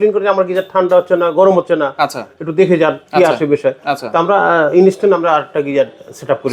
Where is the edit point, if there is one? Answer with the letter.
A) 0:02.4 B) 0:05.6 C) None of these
C